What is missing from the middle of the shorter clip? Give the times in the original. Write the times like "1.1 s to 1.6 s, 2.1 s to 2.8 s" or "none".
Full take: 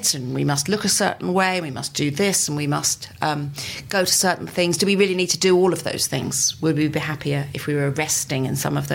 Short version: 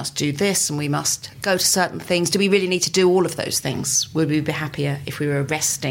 3.0 s to 3.7 s